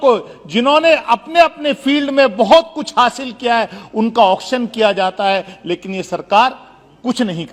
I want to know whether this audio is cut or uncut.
uncut